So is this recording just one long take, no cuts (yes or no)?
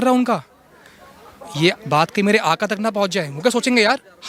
yes